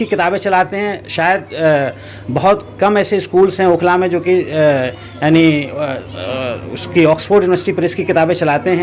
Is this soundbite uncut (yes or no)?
yes